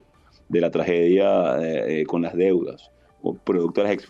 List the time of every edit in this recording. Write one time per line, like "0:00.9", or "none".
none

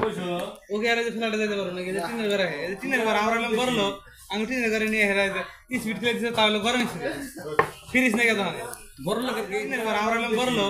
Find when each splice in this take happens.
0:09.7

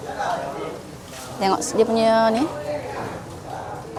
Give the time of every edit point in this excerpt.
none

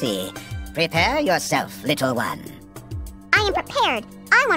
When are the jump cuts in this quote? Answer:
none

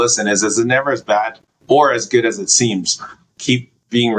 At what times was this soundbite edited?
0:03.3

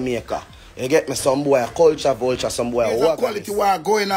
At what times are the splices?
0:03.2

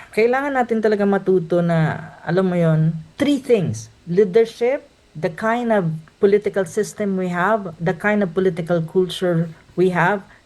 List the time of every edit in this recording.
0:03.1

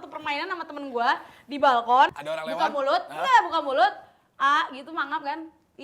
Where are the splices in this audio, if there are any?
0:02.2

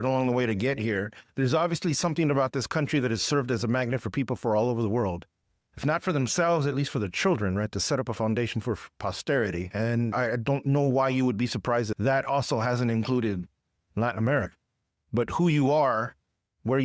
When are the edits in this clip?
0:10.1

